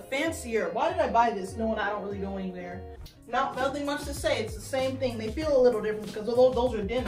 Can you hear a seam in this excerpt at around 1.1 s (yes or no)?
no